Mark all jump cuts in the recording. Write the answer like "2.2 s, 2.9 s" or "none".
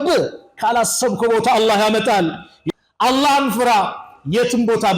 2.5 s